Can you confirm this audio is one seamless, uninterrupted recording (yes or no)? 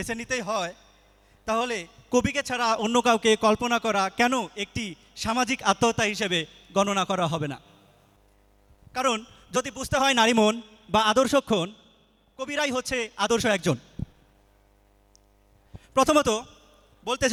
yes